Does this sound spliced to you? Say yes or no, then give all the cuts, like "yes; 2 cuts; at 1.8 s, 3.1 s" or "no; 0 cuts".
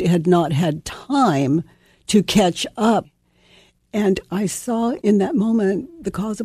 yes; 2 cuts; at 3.2 s, 5.0 s